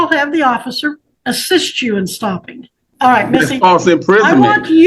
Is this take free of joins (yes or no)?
no